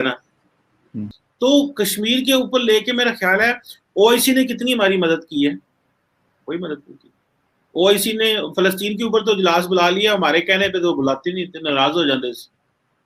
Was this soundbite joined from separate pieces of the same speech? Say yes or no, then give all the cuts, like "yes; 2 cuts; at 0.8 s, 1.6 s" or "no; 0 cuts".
yes; 1 cut; at 1.2 s